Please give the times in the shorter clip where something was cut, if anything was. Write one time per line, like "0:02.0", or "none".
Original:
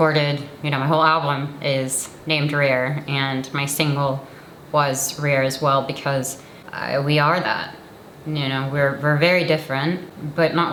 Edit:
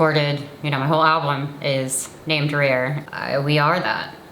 0:03.0